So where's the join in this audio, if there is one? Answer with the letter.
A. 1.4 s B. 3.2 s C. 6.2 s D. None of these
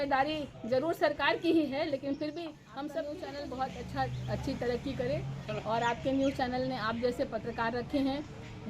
B